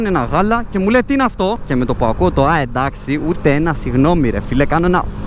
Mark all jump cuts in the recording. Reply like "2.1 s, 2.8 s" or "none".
1.6 s